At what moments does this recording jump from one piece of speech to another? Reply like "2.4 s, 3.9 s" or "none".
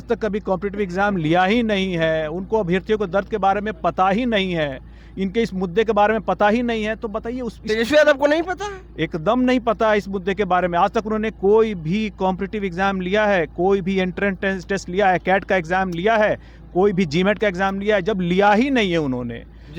none